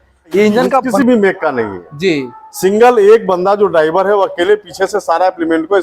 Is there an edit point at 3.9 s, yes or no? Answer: no